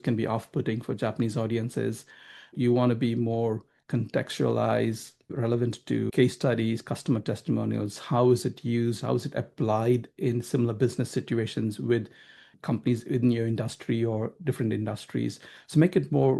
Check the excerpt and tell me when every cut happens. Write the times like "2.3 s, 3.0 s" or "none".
2.5 s, 5.4 s, 12.5 s